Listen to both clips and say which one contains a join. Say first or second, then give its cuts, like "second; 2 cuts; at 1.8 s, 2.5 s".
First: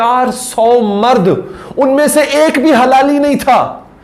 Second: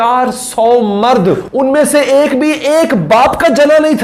second; 1 cut; at 1.5 s